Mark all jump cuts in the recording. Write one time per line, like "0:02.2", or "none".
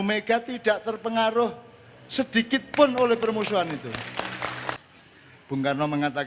0:04.8